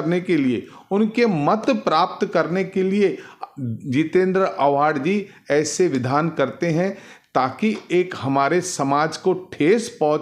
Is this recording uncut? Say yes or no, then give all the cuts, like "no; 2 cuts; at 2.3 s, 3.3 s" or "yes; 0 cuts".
yes; 0 cuts